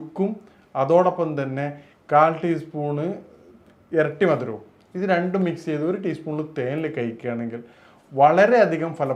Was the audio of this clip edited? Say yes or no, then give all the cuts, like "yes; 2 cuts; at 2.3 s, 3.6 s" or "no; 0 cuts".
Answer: no; 0 cuts